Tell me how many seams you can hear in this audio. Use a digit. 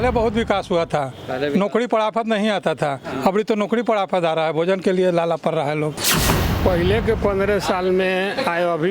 1